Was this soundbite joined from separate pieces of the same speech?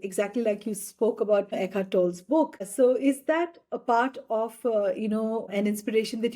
yes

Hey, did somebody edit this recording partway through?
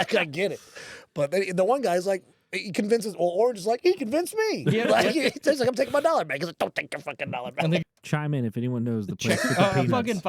yes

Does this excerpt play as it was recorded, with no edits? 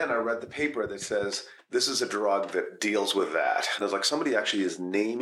no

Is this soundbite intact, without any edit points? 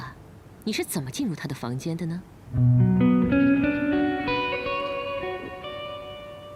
yes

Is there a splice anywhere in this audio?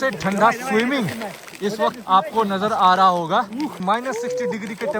yes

